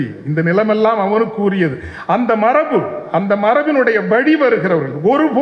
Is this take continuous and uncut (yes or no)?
yes